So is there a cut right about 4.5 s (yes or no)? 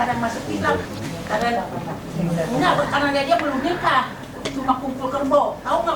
no